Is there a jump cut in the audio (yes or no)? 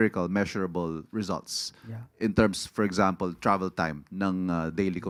no